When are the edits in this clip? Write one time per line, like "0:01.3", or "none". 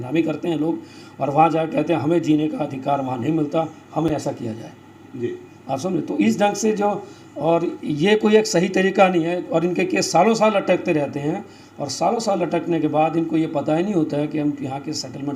none